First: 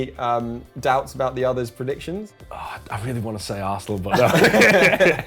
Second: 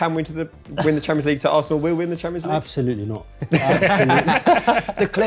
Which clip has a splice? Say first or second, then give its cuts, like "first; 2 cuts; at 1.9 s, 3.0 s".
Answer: first; 1 cut; at 2.3 s